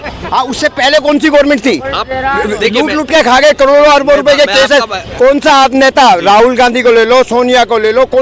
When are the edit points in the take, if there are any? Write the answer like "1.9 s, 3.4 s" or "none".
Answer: none